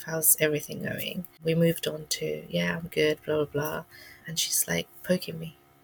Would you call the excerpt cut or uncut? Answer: cut